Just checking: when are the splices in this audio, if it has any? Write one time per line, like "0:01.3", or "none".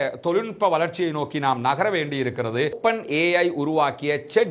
0:02.8